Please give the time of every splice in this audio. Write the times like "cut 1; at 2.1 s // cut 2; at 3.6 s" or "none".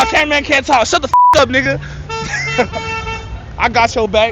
none